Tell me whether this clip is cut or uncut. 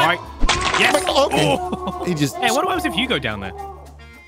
uncut